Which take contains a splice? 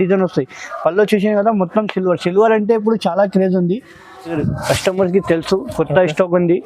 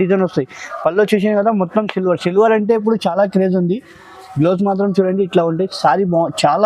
first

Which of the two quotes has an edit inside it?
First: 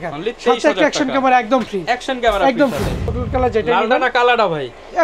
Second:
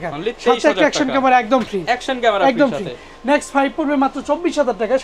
first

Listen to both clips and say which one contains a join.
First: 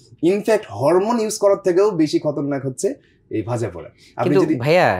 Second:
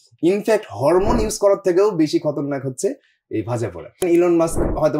second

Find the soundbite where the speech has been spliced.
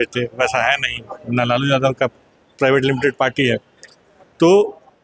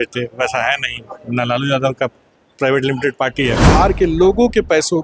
second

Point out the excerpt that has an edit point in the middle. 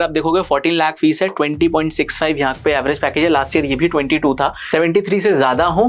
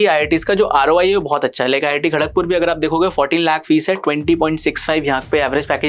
first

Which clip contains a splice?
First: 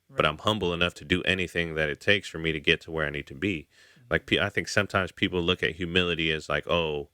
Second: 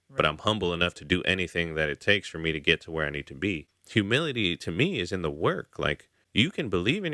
second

